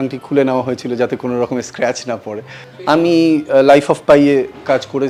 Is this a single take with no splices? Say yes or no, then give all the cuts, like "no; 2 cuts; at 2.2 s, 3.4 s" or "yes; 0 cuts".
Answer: no; 1 cut; at 2.7 s